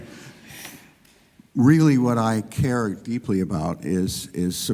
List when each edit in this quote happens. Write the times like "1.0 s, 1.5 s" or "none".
none